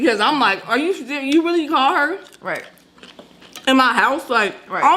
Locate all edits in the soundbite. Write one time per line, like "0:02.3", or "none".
none